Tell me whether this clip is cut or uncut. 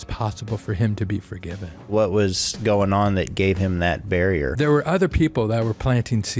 cut